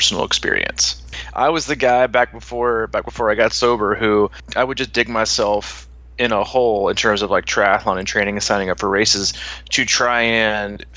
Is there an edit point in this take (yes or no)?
yes